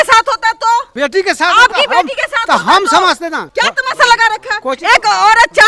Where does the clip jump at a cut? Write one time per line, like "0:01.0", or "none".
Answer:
0:00.9
0:03.4